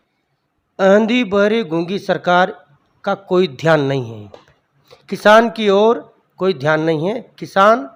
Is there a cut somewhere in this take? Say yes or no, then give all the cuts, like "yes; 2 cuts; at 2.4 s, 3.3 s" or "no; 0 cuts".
no; 0 cuts